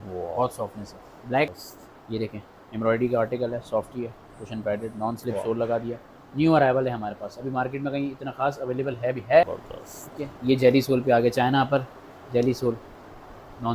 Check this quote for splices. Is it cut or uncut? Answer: cut